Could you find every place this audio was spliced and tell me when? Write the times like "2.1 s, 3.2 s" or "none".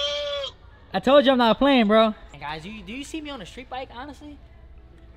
2.3 s